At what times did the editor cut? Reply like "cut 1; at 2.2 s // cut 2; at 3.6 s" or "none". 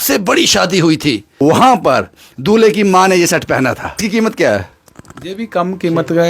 cut 1; at 1.4 s // cut 2; at 4.0 s